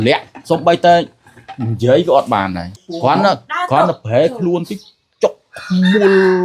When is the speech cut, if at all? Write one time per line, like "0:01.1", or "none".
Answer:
0:02.6